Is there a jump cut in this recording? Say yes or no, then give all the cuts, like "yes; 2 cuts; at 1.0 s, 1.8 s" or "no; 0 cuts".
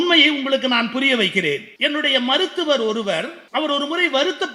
yes; 2 cuts; at 1.7 s, 3.4 s